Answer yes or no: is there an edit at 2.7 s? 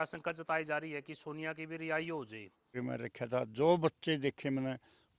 yes